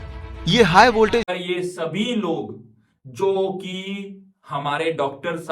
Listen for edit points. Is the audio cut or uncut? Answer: cut